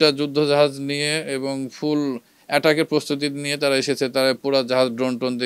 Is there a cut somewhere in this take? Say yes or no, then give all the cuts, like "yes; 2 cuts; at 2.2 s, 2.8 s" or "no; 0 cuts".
no; 0 cuts